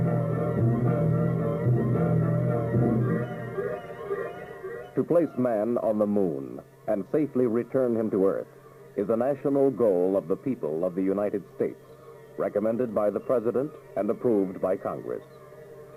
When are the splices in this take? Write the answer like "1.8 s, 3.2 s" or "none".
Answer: none